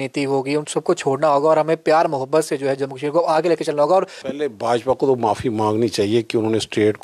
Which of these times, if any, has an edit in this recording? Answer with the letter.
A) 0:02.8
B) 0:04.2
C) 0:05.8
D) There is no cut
B